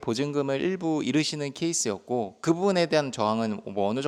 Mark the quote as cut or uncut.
uncut